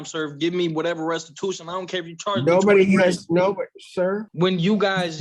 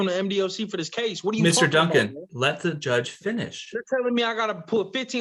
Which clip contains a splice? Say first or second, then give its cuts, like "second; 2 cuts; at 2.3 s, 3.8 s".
first; 1 cut; at 4.3 s